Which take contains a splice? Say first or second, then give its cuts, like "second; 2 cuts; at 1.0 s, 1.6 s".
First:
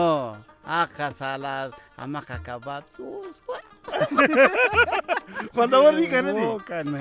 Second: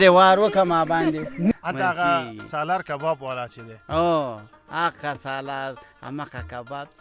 second; 1 cut; at 1.6 s